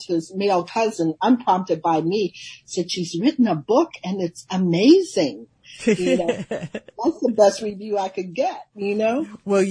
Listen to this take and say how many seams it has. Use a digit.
0